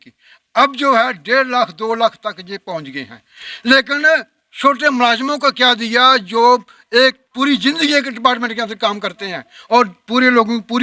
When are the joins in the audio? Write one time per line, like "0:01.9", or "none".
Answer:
none